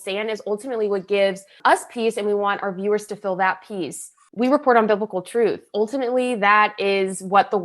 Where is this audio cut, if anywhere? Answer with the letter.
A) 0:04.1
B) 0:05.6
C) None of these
A